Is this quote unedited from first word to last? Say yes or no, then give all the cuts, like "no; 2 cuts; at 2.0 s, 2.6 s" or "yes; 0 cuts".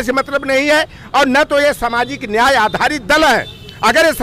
yes; 0 cuts